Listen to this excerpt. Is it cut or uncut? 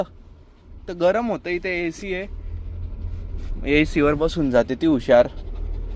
uncut